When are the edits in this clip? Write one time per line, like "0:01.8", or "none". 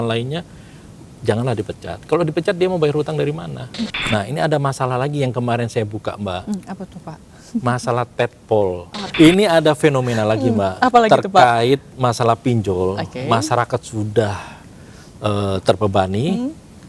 0:03.8
0:09.0